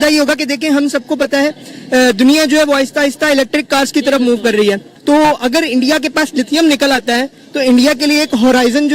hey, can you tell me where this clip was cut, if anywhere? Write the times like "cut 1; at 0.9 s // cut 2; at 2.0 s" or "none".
cut 1; at 4.9 s